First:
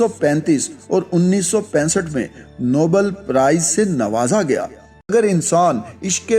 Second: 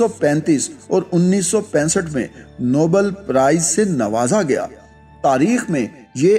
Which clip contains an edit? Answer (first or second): first